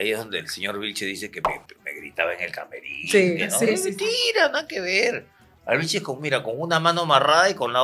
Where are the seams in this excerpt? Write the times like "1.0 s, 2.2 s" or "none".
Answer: none